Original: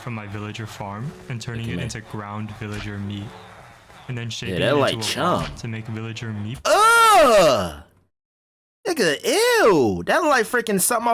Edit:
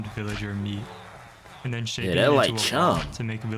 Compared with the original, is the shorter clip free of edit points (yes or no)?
yes